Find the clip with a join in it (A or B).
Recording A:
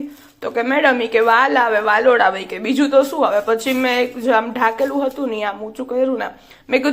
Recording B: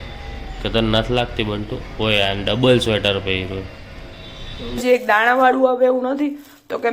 B